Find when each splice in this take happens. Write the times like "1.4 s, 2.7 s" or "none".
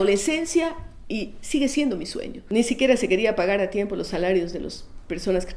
2.4 s